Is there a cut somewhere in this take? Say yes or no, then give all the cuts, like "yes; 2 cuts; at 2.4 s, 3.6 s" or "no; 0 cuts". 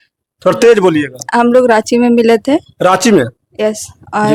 no; 0 cuts